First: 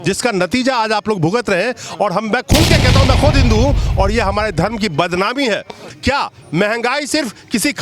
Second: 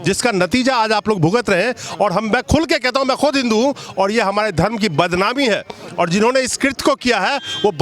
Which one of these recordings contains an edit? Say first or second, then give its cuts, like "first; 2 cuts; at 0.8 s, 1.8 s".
first; 1 cut; at 5.8 s